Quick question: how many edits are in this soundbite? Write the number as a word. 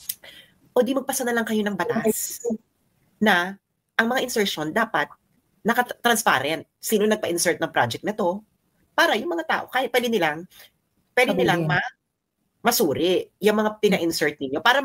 zero